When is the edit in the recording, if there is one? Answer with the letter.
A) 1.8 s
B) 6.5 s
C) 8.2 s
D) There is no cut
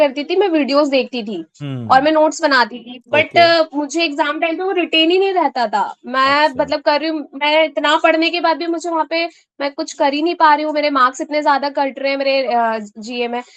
D